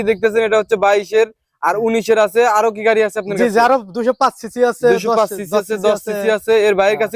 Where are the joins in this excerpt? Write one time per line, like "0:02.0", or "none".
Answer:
none